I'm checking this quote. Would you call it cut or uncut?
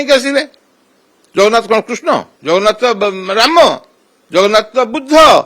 cut